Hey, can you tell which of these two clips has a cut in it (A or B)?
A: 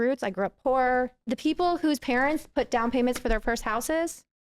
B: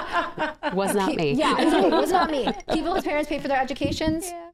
A